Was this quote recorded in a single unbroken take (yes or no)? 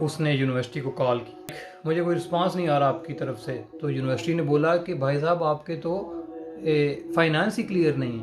no